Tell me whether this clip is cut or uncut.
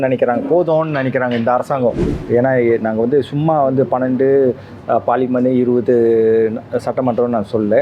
cut